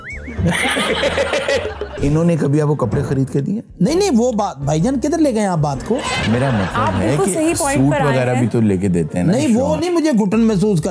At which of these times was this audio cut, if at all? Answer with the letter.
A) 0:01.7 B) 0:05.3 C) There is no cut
A